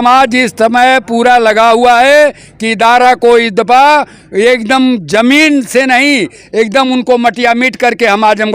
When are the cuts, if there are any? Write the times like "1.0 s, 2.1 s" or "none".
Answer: none